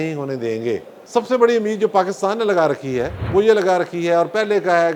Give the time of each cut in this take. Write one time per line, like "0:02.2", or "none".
0:01.0
0:03.2

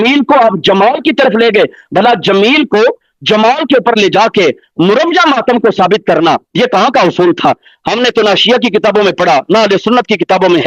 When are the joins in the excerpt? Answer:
none

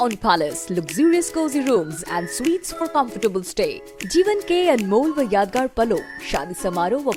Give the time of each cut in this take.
none

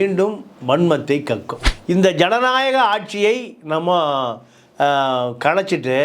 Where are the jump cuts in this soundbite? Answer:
0:01.7

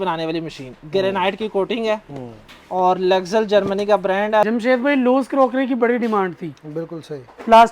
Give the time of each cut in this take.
0:04.5

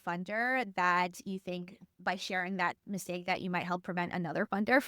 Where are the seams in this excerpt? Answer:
none

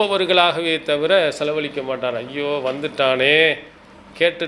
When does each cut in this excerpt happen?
none

